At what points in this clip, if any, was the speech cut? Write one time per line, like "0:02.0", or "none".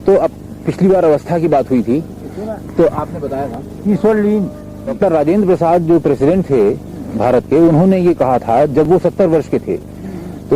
0:05.0